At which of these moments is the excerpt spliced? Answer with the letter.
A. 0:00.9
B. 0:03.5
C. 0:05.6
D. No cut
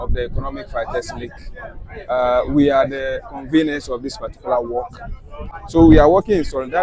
C